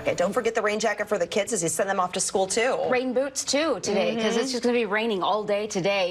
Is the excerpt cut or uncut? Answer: uncut